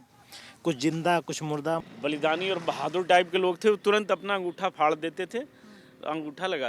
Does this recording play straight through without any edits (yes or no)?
no